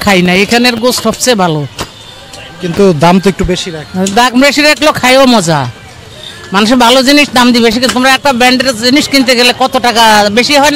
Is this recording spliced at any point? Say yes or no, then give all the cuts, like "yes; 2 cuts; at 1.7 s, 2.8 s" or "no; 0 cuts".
no; 0 cuts